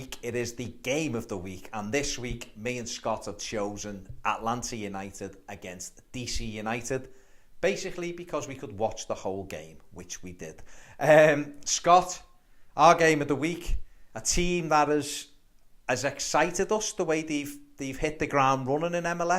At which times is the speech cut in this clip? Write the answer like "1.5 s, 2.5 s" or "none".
7.9 s